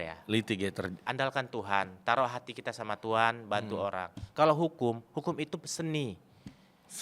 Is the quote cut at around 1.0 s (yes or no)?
yes